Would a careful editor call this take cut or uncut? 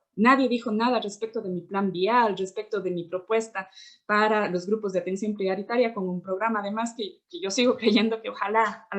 uncut